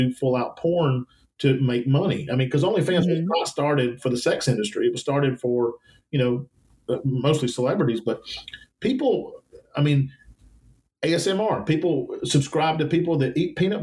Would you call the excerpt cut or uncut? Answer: uncut